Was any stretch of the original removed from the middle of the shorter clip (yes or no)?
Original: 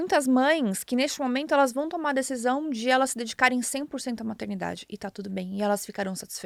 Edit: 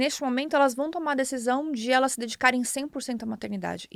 no